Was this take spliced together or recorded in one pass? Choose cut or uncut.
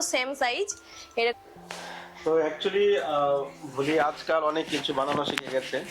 cut